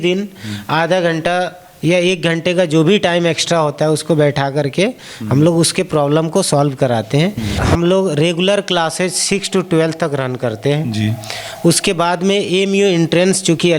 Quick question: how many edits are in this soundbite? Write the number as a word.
one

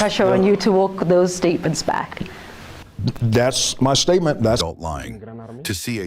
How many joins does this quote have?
one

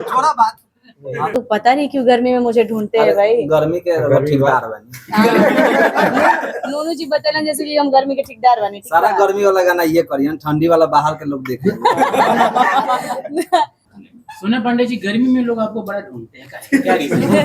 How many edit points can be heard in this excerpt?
two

